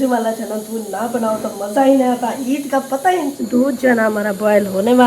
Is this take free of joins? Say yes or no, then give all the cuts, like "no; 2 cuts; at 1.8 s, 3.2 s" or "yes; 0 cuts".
no; 1 cut; at 3.4 s